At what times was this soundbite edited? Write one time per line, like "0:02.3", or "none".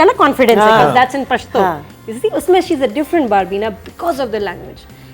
none

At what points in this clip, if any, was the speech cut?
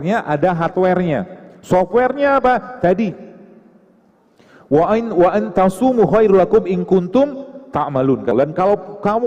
none

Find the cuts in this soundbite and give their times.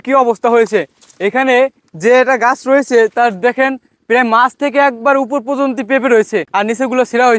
0:06.5

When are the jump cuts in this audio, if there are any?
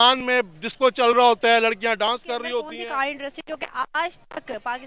0:02.7

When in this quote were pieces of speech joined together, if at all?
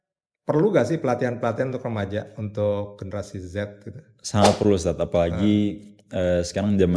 none

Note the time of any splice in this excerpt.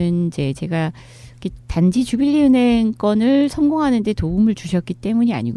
0:04.5

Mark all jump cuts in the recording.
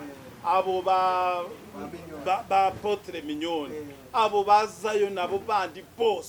none

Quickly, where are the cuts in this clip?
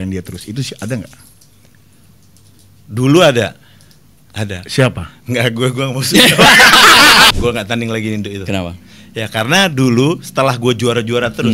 0:07.3

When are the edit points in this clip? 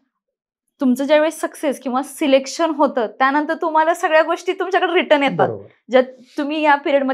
none

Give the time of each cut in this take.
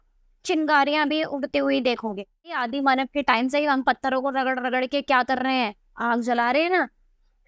0:02.6

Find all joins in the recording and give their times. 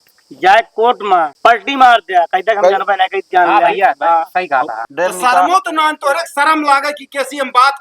0:01.3
0:04.8

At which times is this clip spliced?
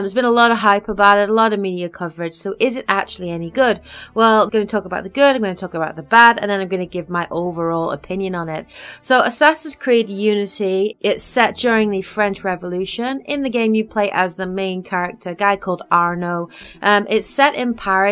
0:02.5

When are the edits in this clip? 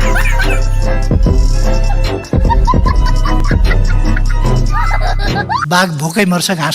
0:05.6

